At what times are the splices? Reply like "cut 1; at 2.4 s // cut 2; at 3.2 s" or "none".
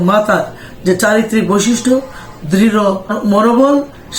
cut 1; at 3.1 s